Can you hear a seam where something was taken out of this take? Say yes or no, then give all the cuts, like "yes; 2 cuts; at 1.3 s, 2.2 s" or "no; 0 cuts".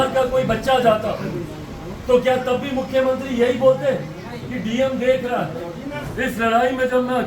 yes; 1 cut; at 6.1 s